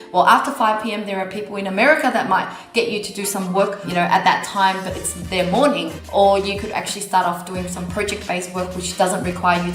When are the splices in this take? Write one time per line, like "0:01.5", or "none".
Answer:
0:03.8
0:05.9